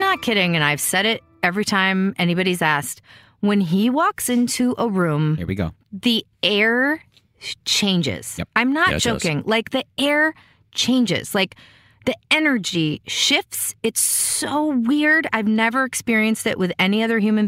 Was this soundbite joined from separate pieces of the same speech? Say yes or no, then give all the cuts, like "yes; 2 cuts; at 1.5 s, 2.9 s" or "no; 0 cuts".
no; 0 cuts